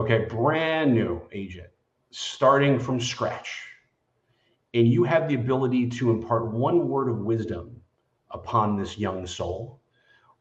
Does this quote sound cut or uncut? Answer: uncut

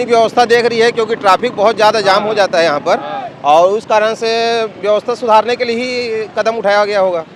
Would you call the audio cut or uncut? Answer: uncut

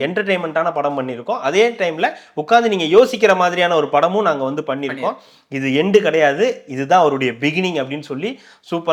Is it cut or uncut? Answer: uncut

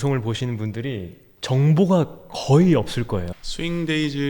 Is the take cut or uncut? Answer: cut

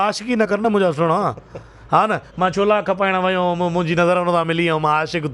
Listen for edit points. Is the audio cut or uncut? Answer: uncut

